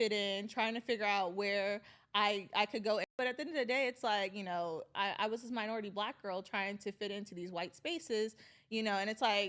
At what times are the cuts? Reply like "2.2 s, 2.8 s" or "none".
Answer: 3.1 s